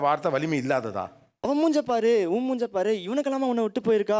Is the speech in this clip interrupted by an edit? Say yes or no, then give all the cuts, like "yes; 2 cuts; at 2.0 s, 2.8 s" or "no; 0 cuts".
yes; 1 cut; at 1.4 s